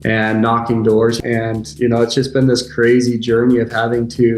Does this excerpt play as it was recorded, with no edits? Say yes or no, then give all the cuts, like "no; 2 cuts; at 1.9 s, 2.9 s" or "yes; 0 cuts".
no; 1 cut; at 1.2 s